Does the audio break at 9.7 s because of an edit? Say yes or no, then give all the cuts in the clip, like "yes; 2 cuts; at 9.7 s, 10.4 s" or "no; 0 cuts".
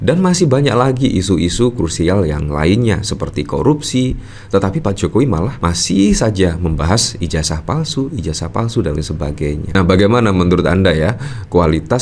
yes; 1 cut; at 9.7 s